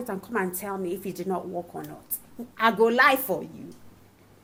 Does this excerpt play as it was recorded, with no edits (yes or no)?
yes